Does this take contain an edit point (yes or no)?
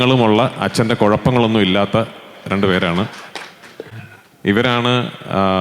no